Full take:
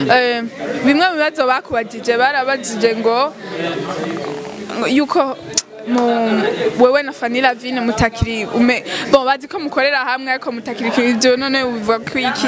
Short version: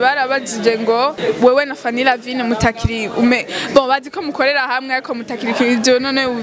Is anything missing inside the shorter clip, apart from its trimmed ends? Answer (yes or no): yes